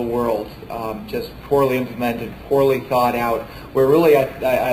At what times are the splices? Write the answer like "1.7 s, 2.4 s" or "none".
1.7 s